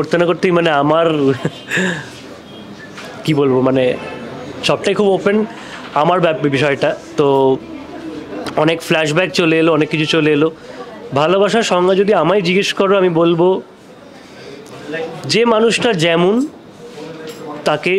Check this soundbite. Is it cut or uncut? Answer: uncut